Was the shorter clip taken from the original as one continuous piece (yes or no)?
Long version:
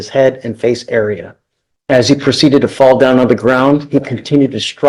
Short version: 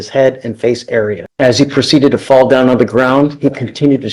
no